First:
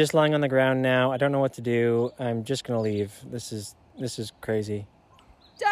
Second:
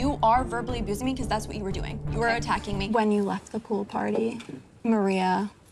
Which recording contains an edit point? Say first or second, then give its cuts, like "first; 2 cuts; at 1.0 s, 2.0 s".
second; 1 cut; at 2.8 s